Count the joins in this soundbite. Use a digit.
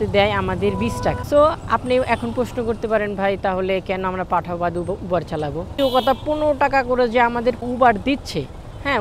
3